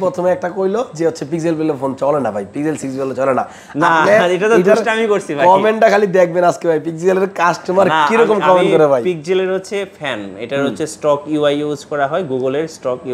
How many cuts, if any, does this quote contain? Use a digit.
0